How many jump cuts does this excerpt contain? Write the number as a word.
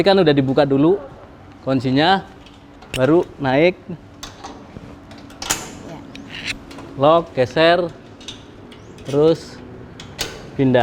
zero